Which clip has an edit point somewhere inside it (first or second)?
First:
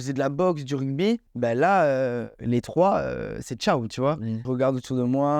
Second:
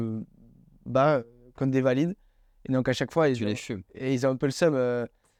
first